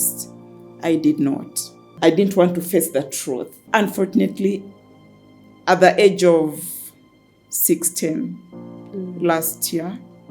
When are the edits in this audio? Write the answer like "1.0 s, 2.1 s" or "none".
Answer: 1.9 s, 3.5 s